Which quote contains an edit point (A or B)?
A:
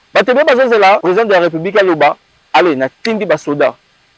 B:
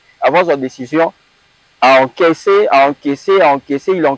A